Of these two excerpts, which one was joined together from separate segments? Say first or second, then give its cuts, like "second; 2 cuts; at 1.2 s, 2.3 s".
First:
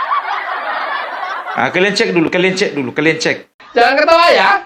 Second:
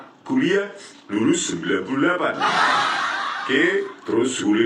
first; 2 cuts; at 1.1 s, 3.5 s